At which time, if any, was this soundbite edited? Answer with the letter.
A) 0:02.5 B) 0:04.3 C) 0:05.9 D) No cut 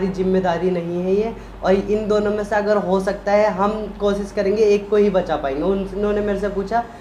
D